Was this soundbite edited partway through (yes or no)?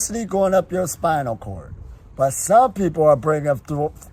no